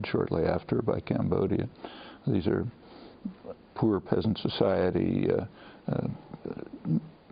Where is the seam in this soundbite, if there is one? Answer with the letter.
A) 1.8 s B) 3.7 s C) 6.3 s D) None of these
C